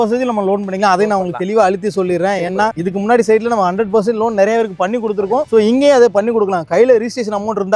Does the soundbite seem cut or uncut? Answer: uncut